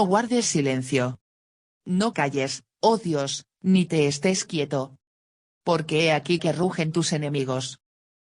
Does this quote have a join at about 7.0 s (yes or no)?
no